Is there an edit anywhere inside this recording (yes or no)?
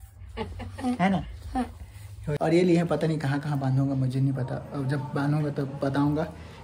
yes